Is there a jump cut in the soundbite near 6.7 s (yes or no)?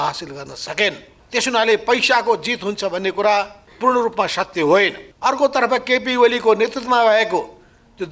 no